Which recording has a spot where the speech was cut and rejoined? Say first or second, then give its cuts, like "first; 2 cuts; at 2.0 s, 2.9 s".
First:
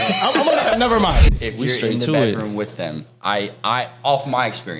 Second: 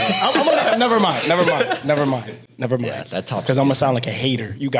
first; 1 cut; at 1.3 s